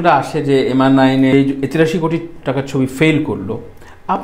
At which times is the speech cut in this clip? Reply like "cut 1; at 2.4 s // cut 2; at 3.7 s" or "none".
none